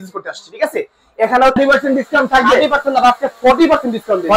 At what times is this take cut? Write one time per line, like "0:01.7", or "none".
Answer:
0:01.6